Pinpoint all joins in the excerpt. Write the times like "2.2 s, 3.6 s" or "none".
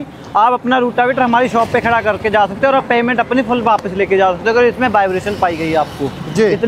none